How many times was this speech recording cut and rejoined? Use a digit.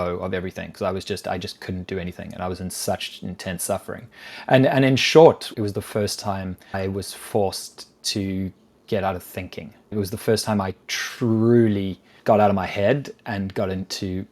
2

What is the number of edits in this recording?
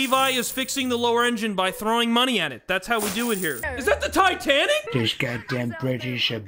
1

